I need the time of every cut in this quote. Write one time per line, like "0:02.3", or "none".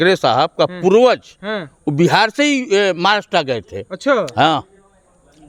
none